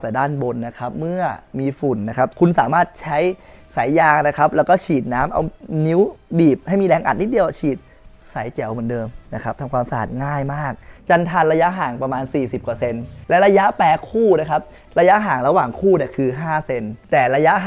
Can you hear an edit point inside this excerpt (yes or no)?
yes